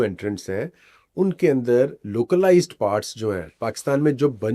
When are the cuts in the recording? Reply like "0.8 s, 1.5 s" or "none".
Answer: none